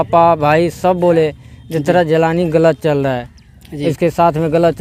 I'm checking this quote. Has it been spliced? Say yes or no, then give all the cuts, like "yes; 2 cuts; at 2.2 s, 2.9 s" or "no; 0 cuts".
no; 0 cuts